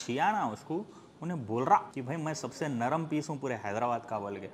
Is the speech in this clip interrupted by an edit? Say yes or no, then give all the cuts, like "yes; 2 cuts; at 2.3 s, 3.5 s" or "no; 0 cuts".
no; 0 cuts